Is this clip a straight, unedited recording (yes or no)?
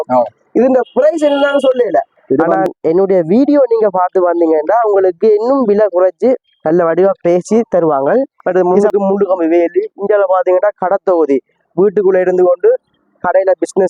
no